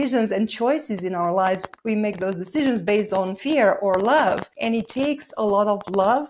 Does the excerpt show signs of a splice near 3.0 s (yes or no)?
no